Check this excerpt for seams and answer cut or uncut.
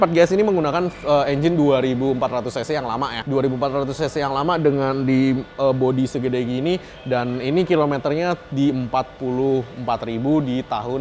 uncut